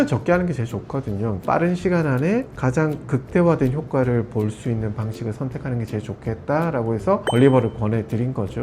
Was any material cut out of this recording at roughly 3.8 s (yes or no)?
no